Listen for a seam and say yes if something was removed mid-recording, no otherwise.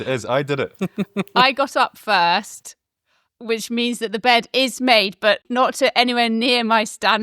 yes